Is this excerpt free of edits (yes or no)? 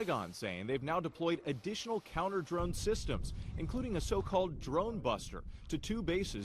yes